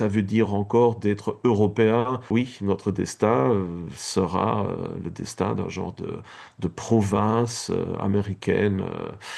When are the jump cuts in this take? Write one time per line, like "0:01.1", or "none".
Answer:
0:02.2